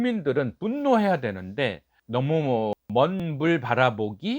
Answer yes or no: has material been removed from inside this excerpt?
yes